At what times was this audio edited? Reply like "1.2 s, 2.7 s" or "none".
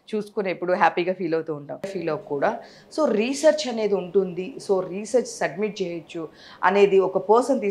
1.9 s